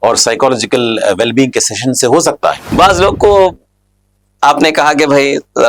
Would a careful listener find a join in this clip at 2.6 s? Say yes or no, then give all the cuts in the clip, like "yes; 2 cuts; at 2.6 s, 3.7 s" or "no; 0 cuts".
yes; 1 cut; at 2.6 s